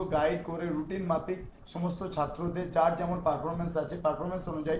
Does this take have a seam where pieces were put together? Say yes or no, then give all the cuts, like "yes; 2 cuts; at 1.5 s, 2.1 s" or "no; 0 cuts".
no; 0 cuts